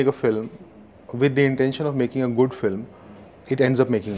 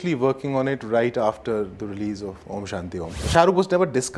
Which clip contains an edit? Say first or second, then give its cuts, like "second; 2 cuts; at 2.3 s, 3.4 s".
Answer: second; 1 cut; at 3.2 s